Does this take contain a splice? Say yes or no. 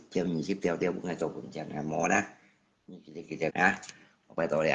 yes